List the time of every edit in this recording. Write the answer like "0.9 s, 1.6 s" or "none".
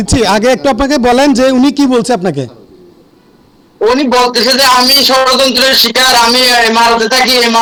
none